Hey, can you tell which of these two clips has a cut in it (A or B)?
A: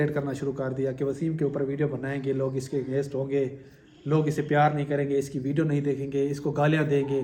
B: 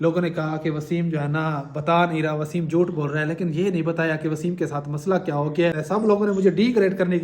B